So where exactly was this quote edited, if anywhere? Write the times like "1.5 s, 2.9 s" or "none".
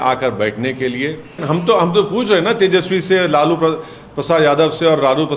1.4 s